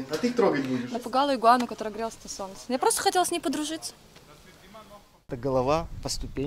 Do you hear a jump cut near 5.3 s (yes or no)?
yes